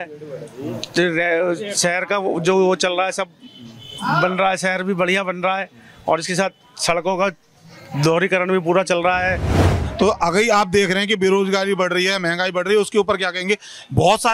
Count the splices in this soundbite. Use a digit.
1